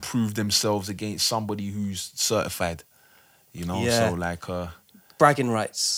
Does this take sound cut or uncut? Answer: uncut